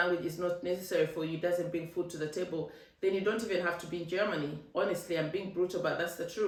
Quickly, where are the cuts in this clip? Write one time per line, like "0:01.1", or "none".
none